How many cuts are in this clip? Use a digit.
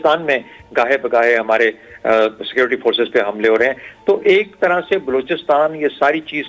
0